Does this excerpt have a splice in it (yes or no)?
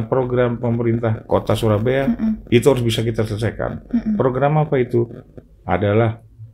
yes